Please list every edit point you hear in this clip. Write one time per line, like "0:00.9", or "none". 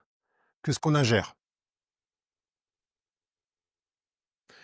none